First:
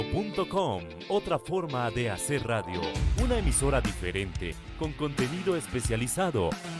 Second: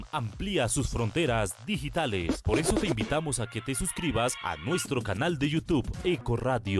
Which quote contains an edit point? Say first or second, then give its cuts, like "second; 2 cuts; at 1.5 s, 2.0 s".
second; 1 cut; at 2.9 s